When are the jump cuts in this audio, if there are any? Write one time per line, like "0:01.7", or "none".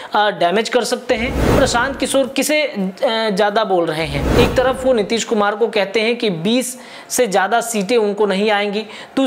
0:01.5
0:04.2